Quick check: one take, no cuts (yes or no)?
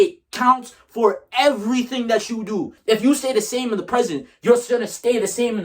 no